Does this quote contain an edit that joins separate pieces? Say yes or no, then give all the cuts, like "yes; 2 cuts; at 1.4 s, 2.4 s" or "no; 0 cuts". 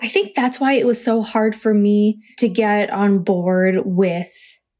yes; 1 cut; at 2.3 s